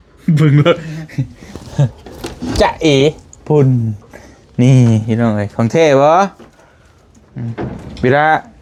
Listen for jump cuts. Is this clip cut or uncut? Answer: uncut